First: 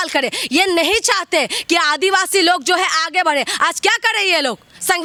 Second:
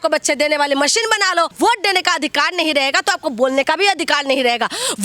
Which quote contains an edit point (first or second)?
second